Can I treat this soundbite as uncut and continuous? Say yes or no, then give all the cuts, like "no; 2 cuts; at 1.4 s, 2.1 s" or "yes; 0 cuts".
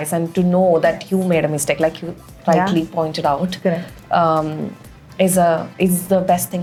yes; 0 cuts